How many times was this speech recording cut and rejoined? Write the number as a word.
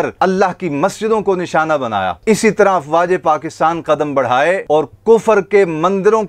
one